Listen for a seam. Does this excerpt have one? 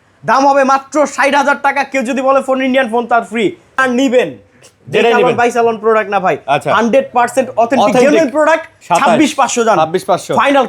yes; 2 cuts; at 3.8 s, 8.7 s

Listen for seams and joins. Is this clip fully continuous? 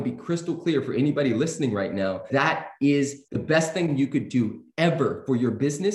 no; 2 cuts; at 2.3 s, 3.3 s

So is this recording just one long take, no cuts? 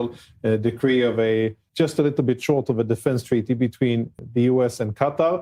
no; 2 cuts; at 1.6 s, 4.1 s

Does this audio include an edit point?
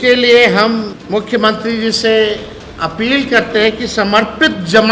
yes; 1 cut; at 1.0 s

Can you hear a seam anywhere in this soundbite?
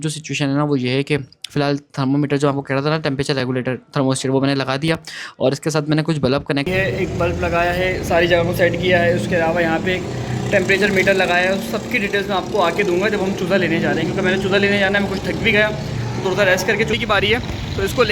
yes; 2 cuts; at 6.7 s, 17.0 s

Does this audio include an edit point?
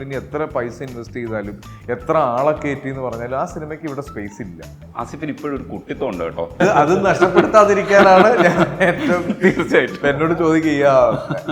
yes; 2 cuts; at 4.8 s, 6.6 s

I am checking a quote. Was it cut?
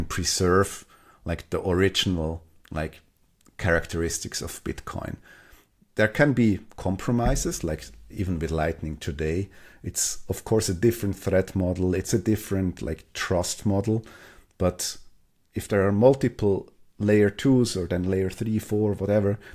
no; 0 cuts

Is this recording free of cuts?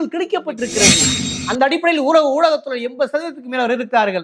no; 1 cut; at 1.0 s

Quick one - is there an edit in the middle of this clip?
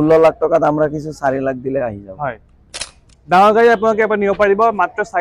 no; 0 cuts

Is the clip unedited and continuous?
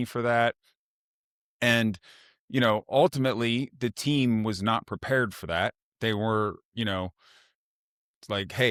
yes; 0 cuts

